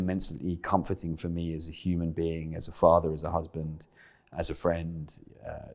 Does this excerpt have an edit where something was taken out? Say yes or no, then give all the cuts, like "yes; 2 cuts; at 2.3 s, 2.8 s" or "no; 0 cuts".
yes; 1 cut; at 4.3 s